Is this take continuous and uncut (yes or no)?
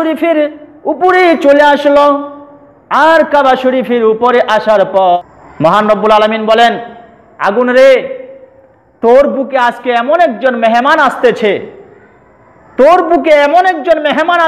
no